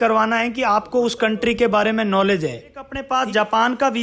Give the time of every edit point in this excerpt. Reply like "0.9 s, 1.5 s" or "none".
3.0 s

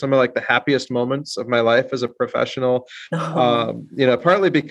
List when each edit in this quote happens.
none

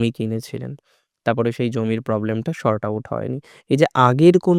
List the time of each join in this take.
none

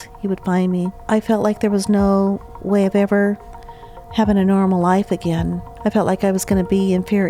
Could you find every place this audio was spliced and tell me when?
1.0 s, 5.6 s

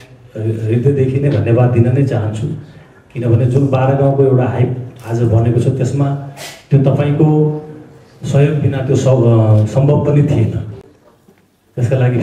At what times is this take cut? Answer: none

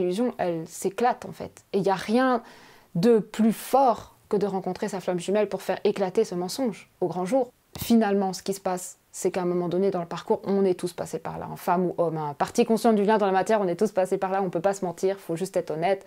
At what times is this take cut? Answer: 7.6 s

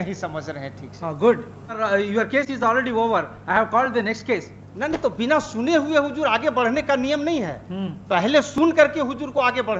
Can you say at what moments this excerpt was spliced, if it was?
1.8 s

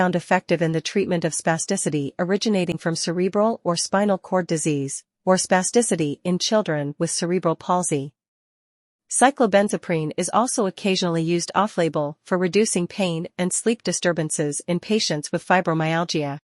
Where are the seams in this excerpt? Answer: 9.5 s

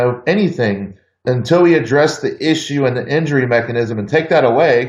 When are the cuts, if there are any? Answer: 1.2 s

